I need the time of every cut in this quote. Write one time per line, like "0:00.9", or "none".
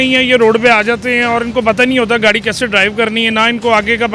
none

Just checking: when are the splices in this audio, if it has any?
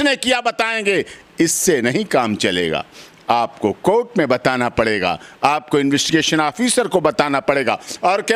none

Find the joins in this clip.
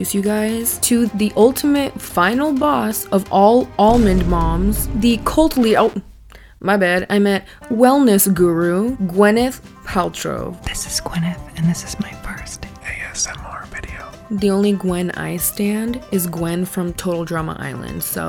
0:01.1
0:14.1

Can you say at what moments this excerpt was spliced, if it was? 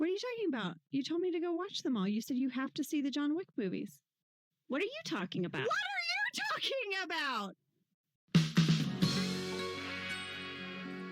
0:08.5

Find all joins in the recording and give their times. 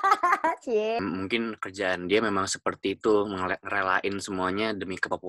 0:01.0

